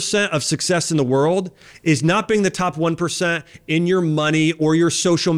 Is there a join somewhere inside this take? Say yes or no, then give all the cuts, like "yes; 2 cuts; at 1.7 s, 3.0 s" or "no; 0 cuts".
no; 0 cuts